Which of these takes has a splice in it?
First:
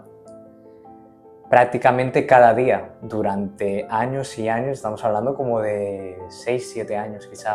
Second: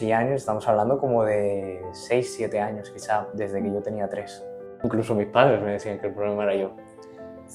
second; 1 cut; at 4.8 s

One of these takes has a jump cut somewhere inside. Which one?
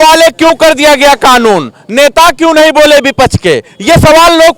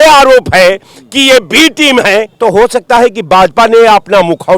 second; 1 cut; at 2.3 s

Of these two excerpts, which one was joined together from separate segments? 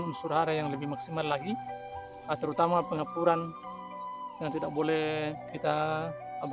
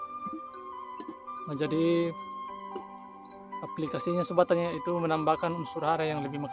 second; 1 cut; at 1.3 s

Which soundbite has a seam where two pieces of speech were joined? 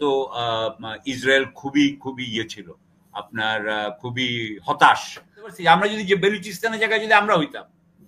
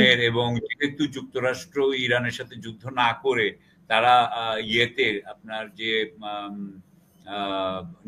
first; 1 cut; at 5.6 s

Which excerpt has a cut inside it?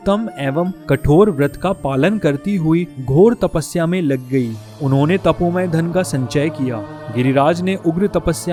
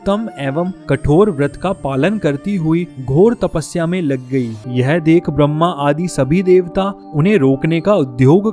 second; 1 cut; at 4.6 s

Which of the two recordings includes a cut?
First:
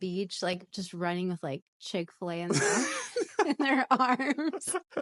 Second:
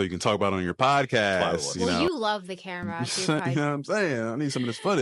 second; 2 cuts; at 1.6 s, 3.0 s

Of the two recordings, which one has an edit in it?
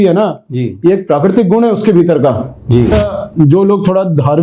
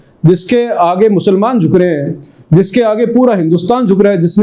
first; 1 cut; at 2.9 s

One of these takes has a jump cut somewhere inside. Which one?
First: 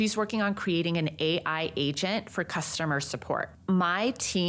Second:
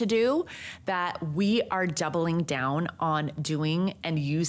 first; 1 cut; at 3.5 s

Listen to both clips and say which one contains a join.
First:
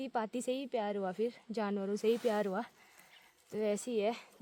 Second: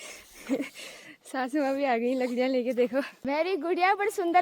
second; 1 cut; at 3.2 s

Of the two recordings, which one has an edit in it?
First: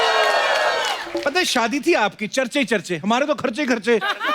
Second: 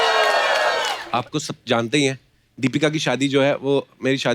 second; 1 cut; at 1.0 s

